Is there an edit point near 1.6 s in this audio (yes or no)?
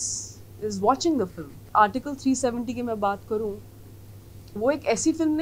yes